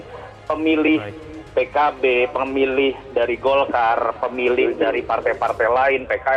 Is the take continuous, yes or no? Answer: yes